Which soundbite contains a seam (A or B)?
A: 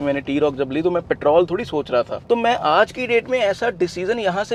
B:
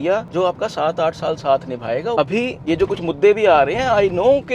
B